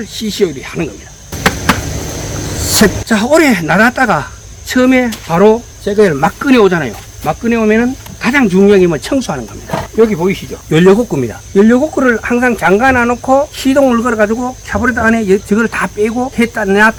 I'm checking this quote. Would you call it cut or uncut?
uncut